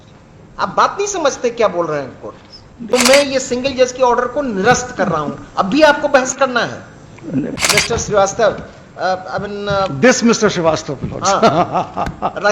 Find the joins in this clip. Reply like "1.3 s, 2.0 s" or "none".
2.9 s, 7.6 s